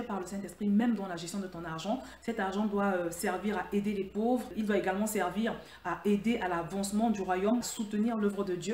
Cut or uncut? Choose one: cut